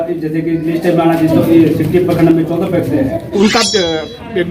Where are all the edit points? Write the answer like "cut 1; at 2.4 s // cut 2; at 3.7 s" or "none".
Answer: cut 1; at 3.2 s